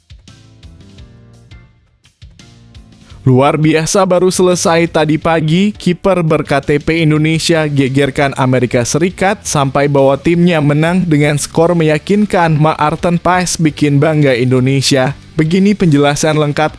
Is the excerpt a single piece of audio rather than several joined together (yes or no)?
no